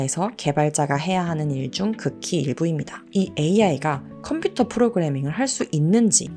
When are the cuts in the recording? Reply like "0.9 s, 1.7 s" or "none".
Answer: 3.1 s

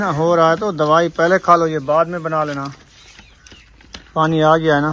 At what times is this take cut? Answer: none

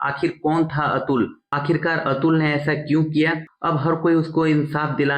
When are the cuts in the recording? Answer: 3.5 s

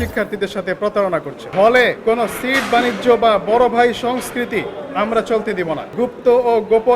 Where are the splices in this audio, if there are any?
1.4 s, 2.0 s, 5.9 s

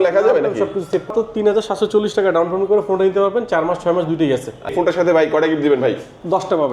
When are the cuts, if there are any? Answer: 1.1 s, 4.7 s

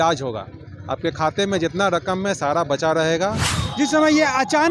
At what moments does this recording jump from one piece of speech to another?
3.6 s

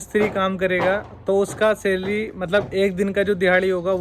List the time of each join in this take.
none

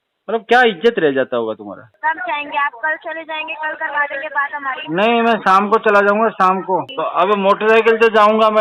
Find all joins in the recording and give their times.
1.9 s, 7.0 s

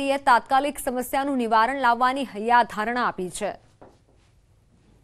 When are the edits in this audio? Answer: 4.0 s

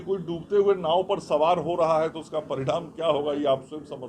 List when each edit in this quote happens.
2.5 s

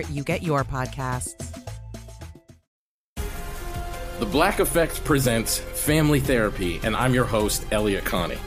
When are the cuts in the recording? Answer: 2.6 s

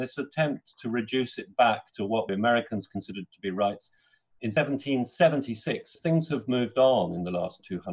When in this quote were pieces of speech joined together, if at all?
2.3 s, 4.5 s, 5.9 s

